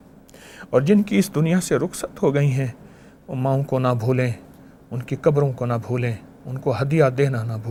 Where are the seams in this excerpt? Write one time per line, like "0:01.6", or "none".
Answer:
none